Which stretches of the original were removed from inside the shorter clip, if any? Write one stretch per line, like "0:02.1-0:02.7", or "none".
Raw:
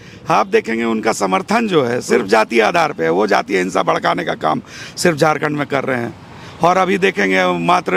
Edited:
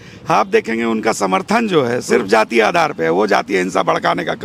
none